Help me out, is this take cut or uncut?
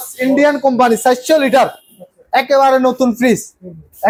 uncut